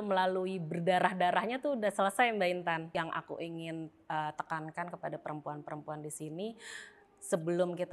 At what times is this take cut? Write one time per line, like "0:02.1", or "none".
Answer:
0:02.9